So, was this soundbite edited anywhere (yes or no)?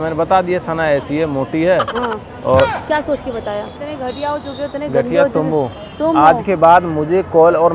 yes